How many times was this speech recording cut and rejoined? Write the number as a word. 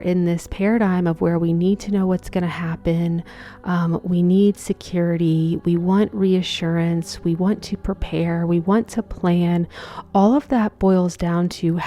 zero